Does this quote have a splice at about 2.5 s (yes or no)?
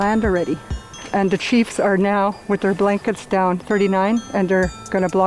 no